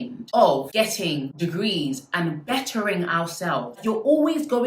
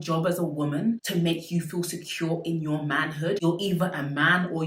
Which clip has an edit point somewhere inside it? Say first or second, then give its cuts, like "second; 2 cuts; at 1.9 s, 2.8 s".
first; 1 cut; at 3.7 s